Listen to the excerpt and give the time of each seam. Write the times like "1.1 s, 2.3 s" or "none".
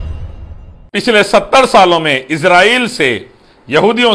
0.9 s